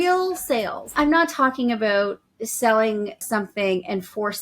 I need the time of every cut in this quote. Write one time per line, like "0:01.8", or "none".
0:00.9
0:03.2